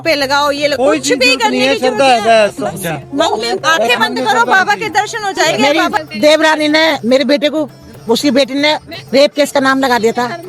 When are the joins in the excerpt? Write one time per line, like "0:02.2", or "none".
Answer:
0:05.7